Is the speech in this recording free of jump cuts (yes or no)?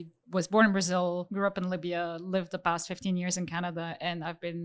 no